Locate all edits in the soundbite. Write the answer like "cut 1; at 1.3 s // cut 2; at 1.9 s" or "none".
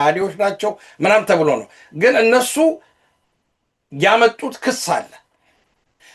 none